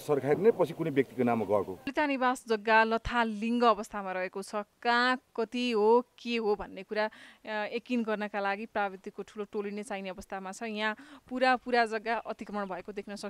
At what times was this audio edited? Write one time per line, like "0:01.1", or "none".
0:01.9